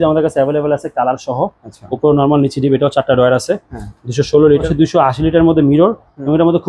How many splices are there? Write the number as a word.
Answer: one